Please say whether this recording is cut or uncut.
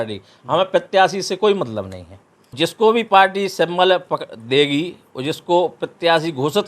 cut